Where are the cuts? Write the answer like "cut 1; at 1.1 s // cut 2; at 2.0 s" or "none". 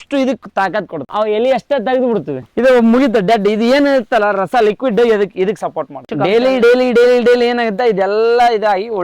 cut 1; at 1.1 s // cut 2; at 2.4 s // cut 3; at 6.1 s